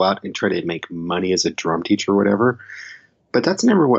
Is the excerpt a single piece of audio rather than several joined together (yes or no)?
yes